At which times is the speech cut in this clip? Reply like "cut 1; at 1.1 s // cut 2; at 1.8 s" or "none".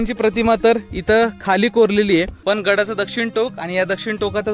cut 1; at 2.3 s